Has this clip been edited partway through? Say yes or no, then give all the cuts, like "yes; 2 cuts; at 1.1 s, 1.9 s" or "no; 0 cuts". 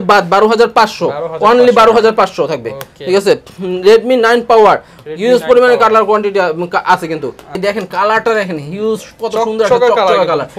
yes; 1 cut; at 7.6 s